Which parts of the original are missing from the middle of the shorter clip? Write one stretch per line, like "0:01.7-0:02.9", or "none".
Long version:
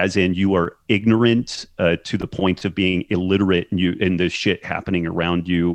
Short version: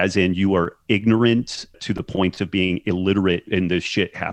0:01.8-0:02.0
0:03.7-0:03.9